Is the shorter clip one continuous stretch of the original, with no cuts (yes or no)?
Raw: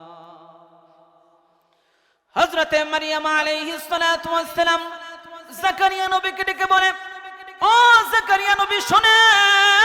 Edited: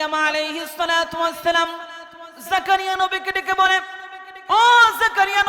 yes